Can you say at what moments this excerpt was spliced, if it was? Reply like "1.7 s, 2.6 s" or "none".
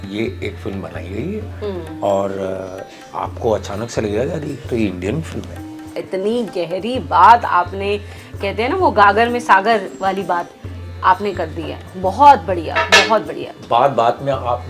5.9 s